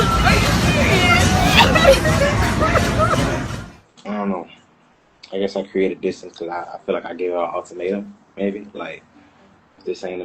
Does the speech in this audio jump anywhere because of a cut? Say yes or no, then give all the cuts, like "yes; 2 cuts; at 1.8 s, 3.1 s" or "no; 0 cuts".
yes; 1 cut; at 3.5 s